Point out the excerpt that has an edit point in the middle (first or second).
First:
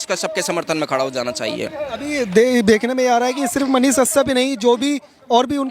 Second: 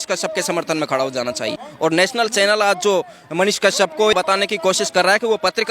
second